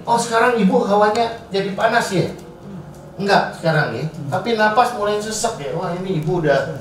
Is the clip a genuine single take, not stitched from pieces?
yes; 0 cuts

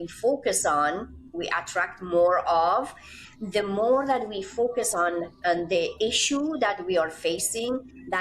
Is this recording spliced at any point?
no; 0 cuts

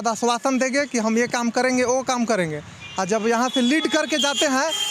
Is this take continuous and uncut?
yes; 0 cuts

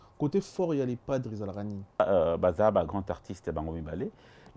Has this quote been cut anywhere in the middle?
yes; 1 cut; at 2.0 s

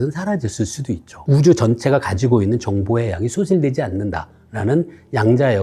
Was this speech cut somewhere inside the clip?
no; 0 cuts

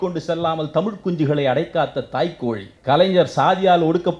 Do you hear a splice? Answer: yes; 1 cut; at 2.7 s

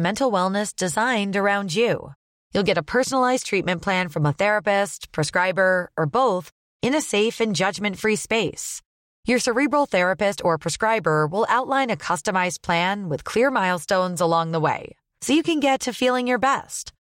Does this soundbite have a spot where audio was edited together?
no; 0 cuts

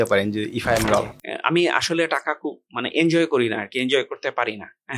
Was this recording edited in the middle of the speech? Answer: yes; 1 cut; at 1.2 s

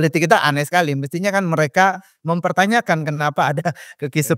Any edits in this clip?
no; 0 cuts

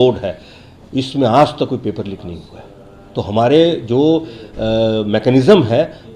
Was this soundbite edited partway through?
no; 0 cuts

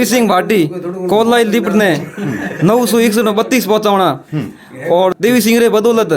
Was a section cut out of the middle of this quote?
yes; 1 cut; at 5.1 s

